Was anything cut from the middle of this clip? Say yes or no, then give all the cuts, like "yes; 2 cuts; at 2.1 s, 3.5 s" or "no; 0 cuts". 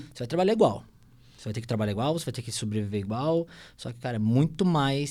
no; 0 cuts